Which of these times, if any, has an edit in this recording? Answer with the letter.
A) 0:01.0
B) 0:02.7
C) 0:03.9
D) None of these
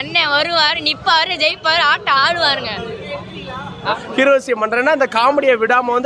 C